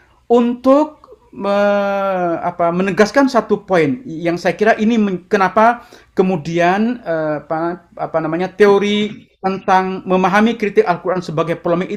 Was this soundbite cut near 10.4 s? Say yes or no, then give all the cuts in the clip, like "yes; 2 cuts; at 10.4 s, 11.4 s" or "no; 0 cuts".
no; 0 cuts